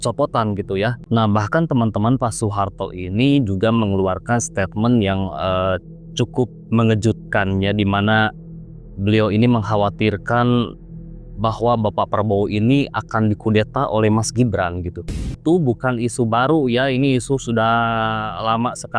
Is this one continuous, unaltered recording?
no; 2 cuts; at 1.0 s, 15.4 s

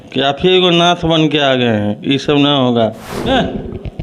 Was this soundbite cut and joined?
yes; 1 cut; at 3.1 s

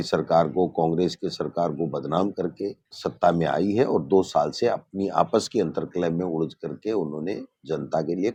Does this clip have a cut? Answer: no; 0 cuts

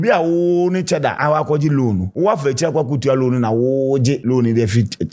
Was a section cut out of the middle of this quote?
yes; 3 cuts; at 1.2 s, 2.1 s, 4.2 s

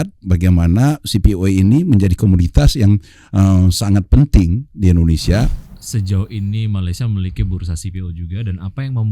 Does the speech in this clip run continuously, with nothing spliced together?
no; 1 cut; at 5.6 s

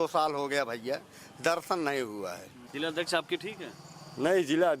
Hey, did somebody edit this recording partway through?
yes; 1 cut; at 2.6 s

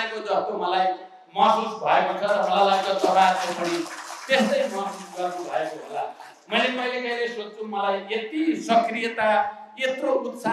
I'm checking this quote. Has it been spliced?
no; 0 cuts

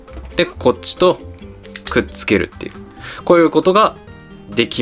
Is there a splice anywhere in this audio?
no; 0 cuts

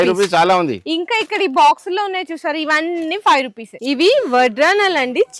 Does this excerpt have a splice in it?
yes; 1 cut; at 3.7 s

